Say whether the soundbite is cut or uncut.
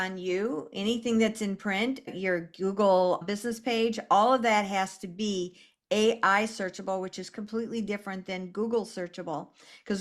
cut